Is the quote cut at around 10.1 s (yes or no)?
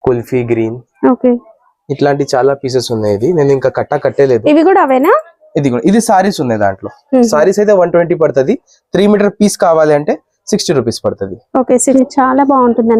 no